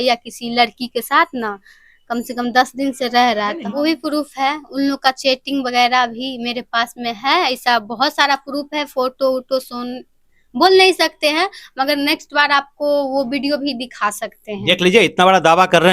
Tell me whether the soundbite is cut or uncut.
cut